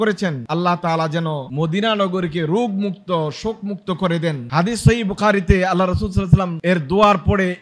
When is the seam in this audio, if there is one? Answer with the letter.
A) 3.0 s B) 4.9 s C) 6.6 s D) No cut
D